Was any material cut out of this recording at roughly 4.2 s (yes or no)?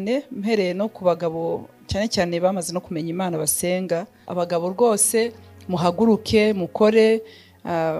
yes